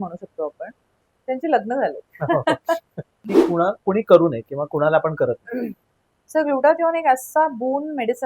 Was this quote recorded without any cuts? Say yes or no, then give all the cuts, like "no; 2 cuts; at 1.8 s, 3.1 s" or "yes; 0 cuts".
no; 1 cut; at 3.1 s